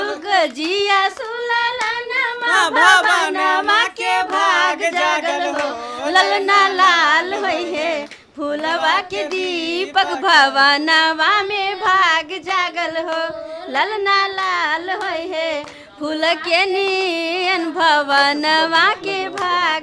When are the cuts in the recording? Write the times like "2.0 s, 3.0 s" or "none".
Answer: none